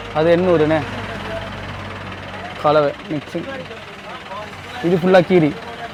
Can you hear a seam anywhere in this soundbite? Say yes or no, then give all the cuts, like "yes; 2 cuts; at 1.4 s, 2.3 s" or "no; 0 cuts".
no; 0 cuts